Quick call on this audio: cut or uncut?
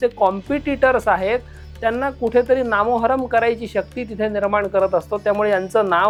uncut